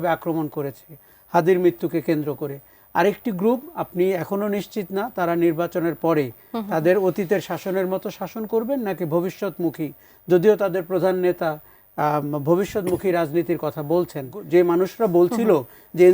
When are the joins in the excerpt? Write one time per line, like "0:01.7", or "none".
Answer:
0:14.4